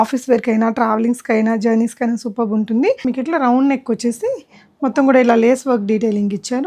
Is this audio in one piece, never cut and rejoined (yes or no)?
no